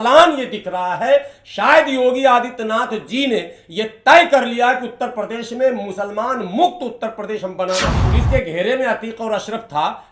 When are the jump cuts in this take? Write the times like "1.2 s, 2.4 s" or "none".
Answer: 8.0 s